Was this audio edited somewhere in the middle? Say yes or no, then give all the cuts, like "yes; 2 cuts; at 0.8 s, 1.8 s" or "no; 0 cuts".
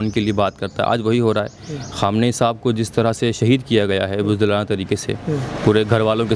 no; 0 cuts